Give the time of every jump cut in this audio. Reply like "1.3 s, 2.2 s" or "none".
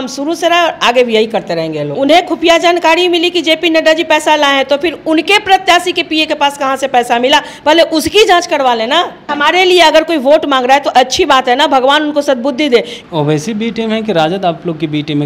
1.8 s, 9.3 s, 12.9 s